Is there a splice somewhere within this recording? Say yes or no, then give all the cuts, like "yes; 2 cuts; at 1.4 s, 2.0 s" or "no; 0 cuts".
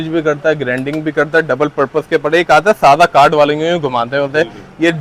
no; 0 cuts